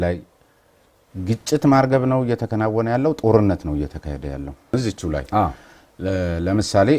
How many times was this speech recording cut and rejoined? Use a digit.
1